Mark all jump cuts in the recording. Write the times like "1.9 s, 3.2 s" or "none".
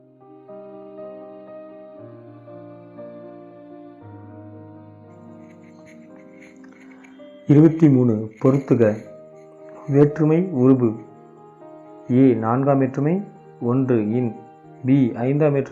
none